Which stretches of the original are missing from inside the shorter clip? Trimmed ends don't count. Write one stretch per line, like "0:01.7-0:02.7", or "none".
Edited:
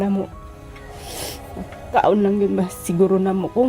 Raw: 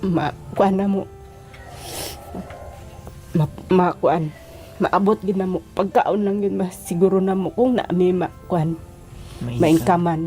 0:02.7-0:05.9